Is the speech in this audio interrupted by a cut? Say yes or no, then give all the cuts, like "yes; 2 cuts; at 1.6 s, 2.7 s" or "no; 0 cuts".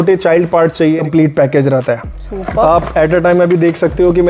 yes; 1 cut; at 1.0 s